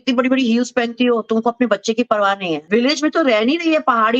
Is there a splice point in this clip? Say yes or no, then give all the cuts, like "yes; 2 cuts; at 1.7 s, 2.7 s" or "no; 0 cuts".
yes; 1 cut; at 2.6 s